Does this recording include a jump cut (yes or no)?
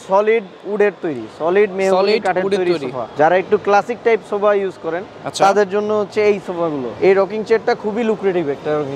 yes